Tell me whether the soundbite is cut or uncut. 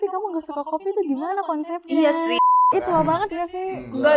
cut